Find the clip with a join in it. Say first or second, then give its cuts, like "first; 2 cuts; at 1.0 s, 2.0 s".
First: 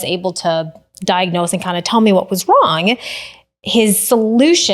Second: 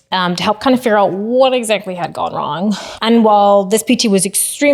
second; 1 cut; at 2.9 s